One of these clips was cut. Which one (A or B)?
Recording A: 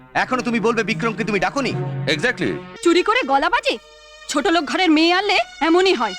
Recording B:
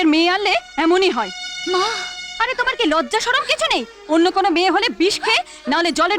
A